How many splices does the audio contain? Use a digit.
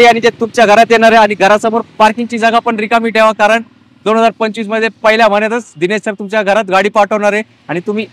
0